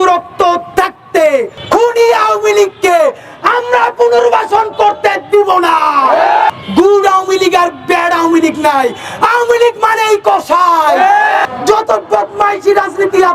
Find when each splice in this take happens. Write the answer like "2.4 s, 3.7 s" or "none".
1.6 s, 6.5 s, 11.4 s

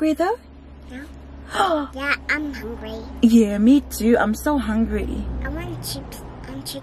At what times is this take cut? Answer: none

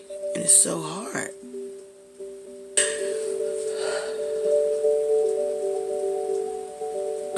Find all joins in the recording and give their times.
2.8 s

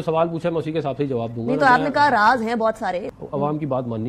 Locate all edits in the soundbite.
3.1 s

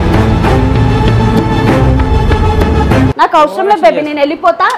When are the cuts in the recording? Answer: 3.1 s

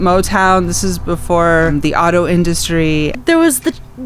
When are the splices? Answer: 1.7 s, 3.2 s

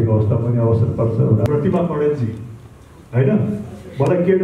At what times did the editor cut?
1.5 s

